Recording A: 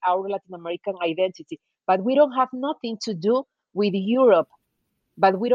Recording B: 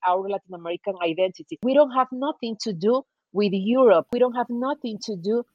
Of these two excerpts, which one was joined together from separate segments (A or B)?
B